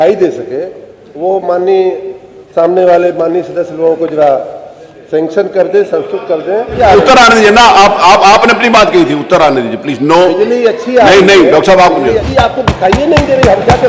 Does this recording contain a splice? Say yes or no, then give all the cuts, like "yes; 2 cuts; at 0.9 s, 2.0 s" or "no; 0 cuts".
yes; 2 cuts; at 6.8 s, 12.2 s